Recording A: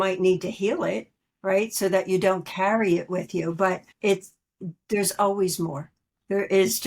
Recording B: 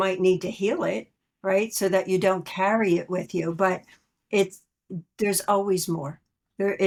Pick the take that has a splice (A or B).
A